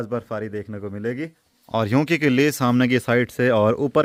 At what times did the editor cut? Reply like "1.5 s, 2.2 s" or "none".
none